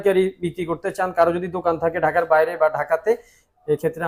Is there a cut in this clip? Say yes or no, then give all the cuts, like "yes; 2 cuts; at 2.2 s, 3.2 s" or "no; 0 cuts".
no; 0 cuts